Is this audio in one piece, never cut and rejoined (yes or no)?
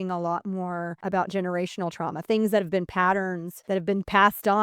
no